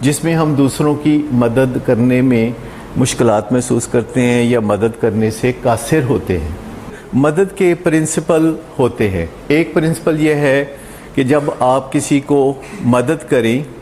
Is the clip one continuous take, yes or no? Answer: no